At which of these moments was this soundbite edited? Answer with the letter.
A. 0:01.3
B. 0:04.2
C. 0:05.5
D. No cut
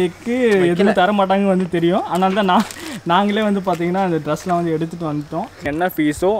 C